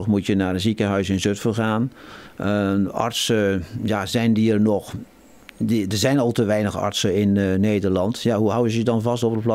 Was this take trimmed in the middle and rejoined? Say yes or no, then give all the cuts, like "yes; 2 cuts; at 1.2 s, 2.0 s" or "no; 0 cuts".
no; 0 cuts